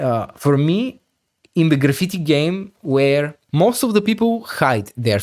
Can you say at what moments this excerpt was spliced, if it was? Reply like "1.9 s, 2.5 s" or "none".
3.4 s